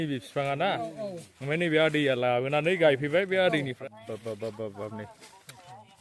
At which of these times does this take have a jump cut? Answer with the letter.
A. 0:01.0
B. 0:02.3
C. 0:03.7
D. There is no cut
C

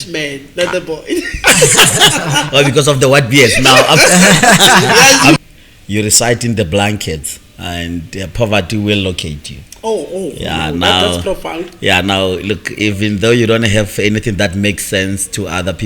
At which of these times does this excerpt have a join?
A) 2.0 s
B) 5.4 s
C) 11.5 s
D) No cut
B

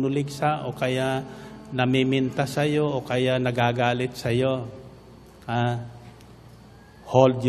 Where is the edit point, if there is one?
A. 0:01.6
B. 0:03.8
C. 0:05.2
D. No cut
D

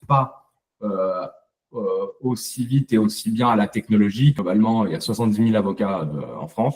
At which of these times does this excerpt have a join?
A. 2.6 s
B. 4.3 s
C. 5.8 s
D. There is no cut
B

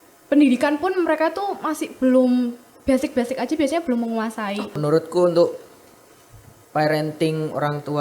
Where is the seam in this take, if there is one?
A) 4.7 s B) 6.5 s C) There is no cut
A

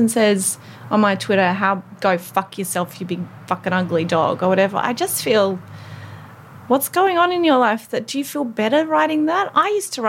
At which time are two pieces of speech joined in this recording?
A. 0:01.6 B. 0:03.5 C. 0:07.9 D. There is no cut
D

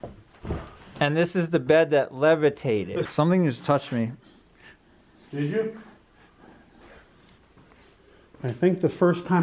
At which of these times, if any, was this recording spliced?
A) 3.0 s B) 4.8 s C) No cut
A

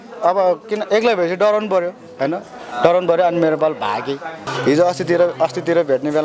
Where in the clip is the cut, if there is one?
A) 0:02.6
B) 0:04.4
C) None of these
B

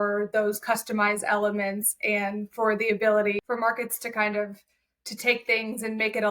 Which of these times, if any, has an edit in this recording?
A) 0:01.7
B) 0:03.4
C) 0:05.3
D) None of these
B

